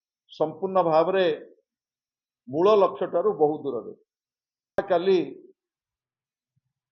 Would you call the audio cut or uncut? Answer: cut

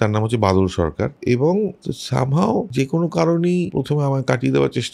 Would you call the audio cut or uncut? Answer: cut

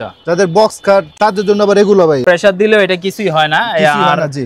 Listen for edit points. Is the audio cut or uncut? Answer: cut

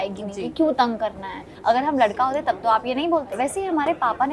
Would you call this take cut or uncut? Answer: cut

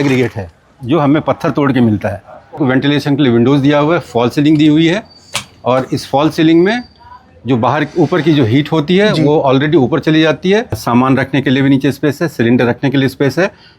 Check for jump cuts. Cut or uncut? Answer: cut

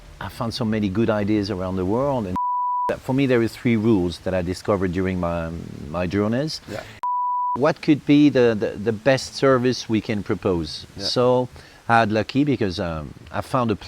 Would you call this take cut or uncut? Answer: cut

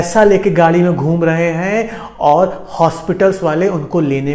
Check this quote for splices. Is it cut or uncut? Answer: uncut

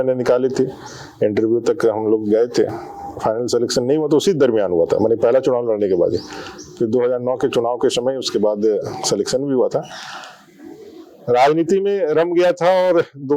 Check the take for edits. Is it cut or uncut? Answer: uncut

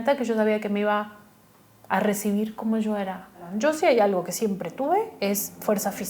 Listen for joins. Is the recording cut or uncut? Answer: cut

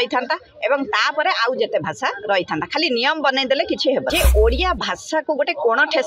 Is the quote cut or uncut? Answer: cut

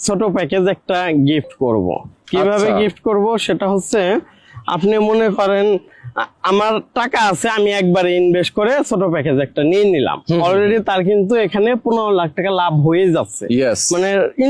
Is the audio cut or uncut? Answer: uncut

